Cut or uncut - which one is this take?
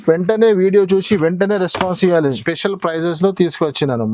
cut